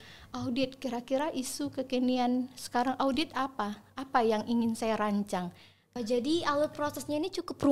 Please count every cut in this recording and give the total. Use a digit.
1